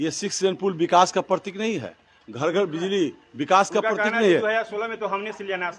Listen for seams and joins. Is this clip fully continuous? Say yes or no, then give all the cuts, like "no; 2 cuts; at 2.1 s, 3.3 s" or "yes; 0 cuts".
yes; 0 cuts